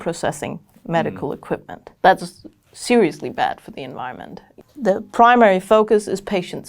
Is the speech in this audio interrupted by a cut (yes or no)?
yes